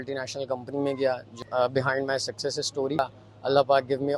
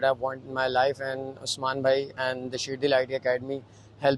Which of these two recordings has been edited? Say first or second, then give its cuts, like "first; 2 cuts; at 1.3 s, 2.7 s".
first; 2 cuts; at 1.4 s, 3.0 s